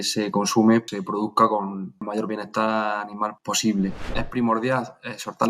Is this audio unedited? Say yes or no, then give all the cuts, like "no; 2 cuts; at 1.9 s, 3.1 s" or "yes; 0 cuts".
no; 4 cuts; at 0.9 s, 2.0 s, 3.4 s, 4.2 s